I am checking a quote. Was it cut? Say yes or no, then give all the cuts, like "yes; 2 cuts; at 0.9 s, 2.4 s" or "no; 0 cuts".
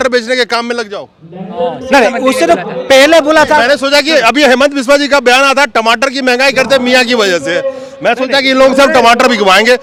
no; 0 cuts